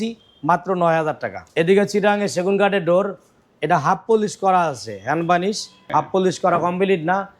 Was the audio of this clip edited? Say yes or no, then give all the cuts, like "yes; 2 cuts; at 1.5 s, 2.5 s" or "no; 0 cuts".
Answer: yes; 2 cuts; at 1.3 s, 5.7 s